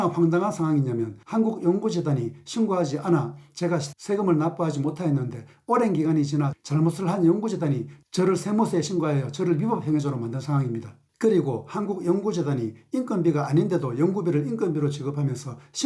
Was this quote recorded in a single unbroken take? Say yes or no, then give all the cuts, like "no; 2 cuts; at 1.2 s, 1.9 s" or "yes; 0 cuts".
no; 1 cut; at 1.1 s